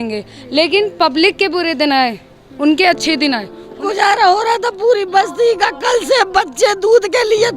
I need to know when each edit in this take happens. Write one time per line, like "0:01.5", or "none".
0:03.6